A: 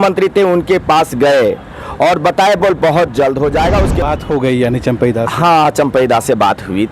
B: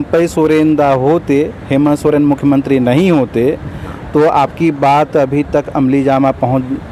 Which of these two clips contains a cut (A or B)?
A